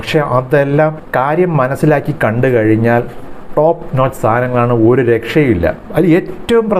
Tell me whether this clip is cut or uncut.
uncut